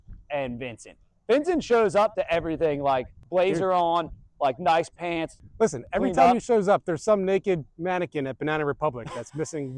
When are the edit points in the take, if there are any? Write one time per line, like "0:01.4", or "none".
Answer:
0:03.2
0:05.4